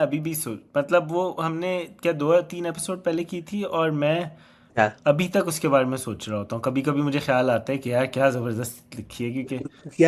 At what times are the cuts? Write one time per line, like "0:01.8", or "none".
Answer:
none